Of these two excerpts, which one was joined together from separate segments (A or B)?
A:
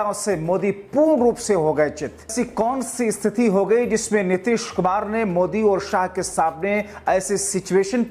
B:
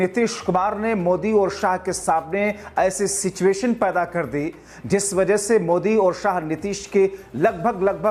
A